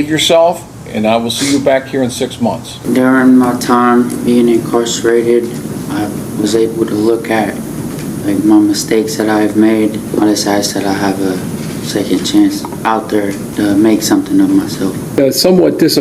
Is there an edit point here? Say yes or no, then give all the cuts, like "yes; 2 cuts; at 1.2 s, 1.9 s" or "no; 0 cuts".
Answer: yes; 3 cuts; at 2.8 s, 10.0 s, 15.2 s